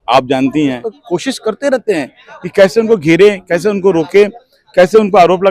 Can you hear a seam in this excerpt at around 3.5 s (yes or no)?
no